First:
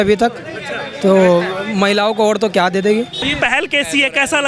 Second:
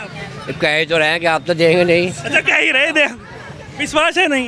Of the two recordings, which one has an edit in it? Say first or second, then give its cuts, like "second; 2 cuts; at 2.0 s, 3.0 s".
first; 1 cut; at 3.2 s